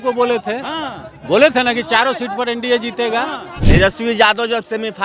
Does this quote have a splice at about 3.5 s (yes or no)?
yes